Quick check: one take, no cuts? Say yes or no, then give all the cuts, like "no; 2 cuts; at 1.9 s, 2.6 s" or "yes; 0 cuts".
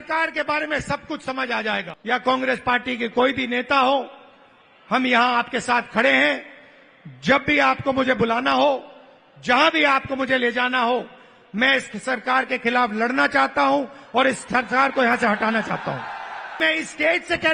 no; 2 cuts; at 1.9 s, 16.6 s